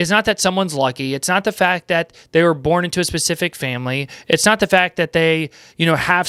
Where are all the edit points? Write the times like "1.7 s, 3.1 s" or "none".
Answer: none